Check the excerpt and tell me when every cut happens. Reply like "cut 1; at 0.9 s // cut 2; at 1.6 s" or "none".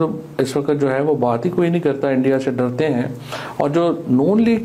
none